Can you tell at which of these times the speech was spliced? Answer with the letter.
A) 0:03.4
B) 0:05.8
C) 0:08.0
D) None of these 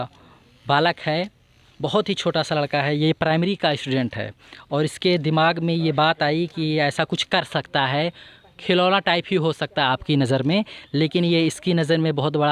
D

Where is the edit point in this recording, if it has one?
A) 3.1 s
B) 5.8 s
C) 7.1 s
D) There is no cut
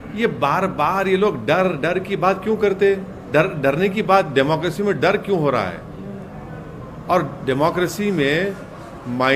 A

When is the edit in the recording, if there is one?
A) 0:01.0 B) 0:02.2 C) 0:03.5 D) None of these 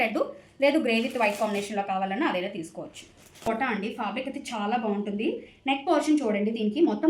C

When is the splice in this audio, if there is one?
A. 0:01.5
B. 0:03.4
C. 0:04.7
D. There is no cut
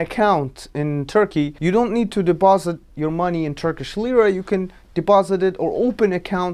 A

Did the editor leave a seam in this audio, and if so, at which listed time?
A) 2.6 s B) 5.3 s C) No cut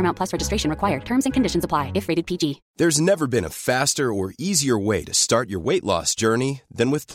A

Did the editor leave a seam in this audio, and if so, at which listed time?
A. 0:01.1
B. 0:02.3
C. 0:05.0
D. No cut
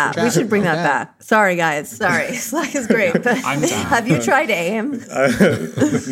C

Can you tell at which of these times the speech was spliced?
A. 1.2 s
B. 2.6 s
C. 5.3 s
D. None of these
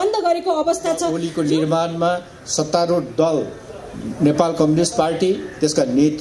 A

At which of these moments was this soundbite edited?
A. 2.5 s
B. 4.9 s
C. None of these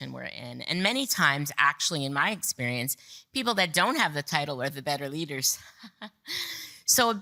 C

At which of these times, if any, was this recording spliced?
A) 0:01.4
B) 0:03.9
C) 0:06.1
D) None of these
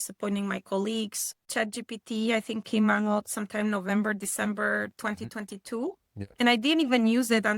A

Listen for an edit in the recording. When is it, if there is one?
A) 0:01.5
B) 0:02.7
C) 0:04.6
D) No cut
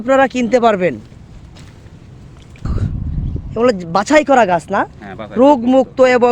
B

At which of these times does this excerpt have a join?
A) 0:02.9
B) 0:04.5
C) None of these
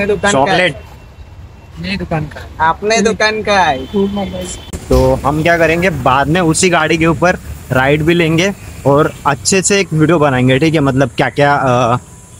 B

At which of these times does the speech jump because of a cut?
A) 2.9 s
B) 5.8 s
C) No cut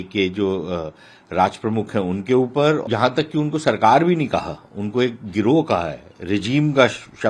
A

